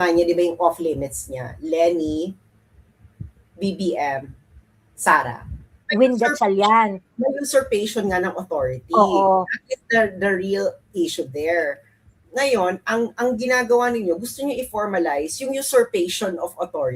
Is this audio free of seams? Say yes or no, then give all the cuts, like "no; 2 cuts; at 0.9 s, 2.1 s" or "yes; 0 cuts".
no; 1 cut; at 5.8 s